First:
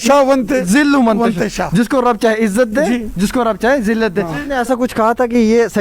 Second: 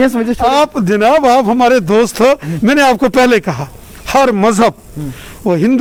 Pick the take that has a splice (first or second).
first